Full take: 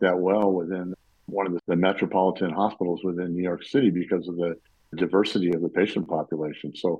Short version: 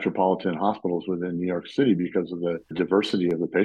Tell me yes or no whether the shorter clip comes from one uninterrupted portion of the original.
no